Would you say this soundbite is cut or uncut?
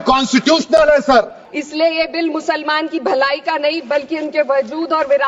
cut